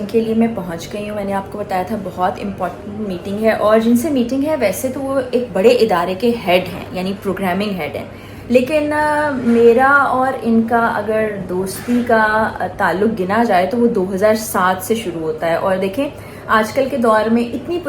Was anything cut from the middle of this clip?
no; 0 cuts

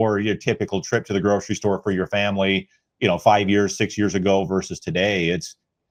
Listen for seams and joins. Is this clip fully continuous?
yes; 0 cuts

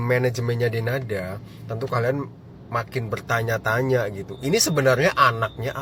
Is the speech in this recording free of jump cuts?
yes; 0 cuts

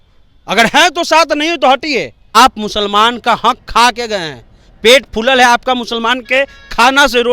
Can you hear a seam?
yes; 1 cut; at 2.4 s

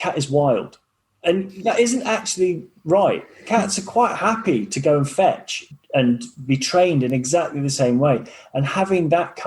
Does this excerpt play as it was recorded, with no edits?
no; 1 cut; at 5.5 s

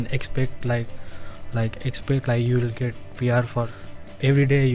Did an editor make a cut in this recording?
yes; 1 cut; at 3.7 s

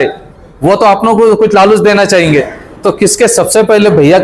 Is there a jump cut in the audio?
no; 0 cuts

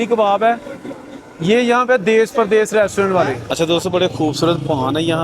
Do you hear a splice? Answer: yes; 1 cut; at 3.4 s

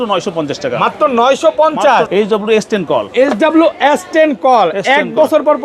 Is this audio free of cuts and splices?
no; 1 cut; at 2.1 s

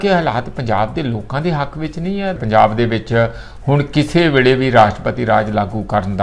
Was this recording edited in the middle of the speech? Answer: yes; 1 cut; at 2.4 s

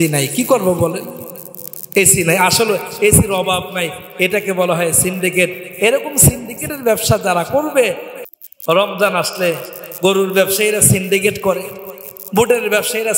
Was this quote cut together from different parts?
yes; 1 cut; at 8.1 s

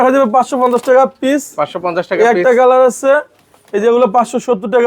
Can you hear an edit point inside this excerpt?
no; 0 cuts

